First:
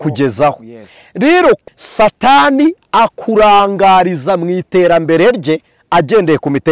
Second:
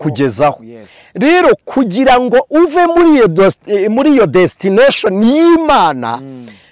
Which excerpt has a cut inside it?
first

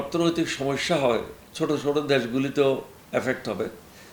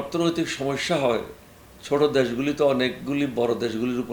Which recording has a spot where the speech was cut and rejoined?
first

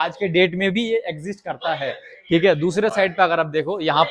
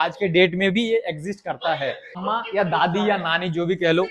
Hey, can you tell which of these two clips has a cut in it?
second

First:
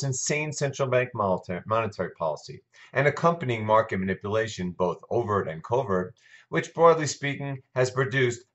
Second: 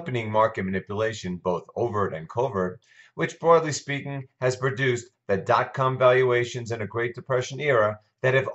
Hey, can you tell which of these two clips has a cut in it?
first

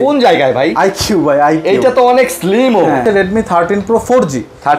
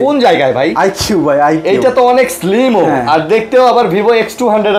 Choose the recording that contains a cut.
first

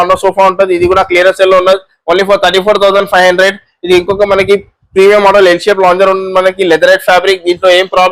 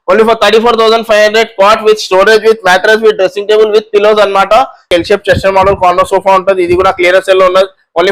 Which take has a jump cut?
second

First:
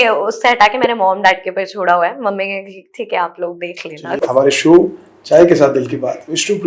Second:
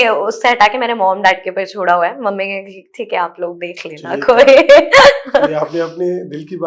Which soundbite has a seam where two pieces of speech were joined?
first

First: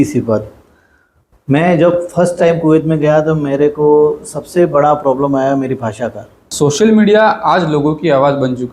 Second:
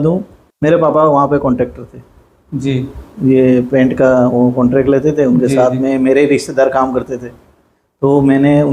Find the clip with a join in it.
first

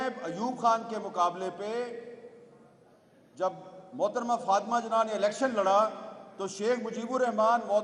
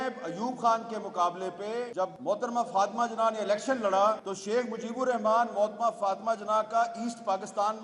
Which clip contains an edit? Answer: second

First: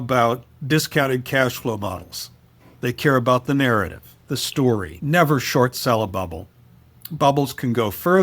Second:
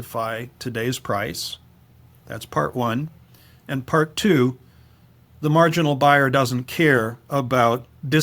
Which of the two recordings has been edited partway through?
first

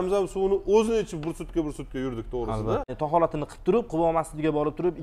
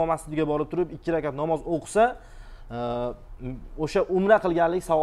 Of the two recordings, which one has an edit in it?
first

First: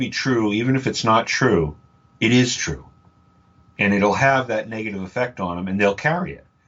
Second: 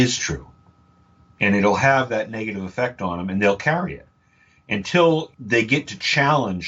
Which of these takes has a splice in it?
second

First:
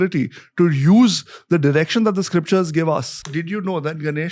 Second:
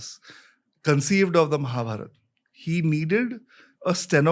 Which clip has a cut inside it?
first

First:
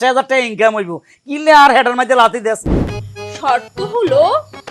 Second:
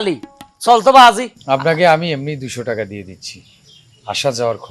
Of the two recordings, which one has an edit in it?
first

